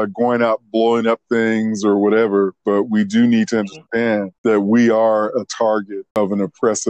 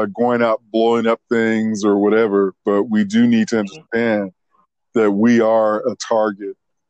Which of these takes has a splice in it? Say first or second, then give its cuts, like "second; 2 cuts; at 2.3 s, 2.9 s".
first; 2 cuts; at 4.3 s, 6.2 s